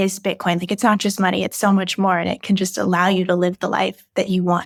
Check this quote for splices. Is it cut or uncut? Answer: uncut